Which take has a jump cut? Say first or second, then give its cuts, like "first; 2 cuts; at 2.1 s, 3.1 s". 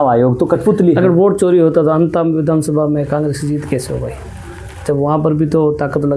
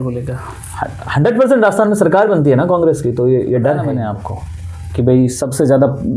second; 1 cut; at 3.9 s